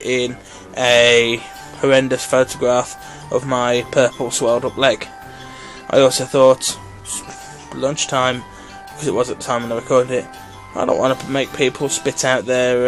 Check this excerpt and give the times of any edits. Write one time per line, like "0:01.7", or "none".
0:03.4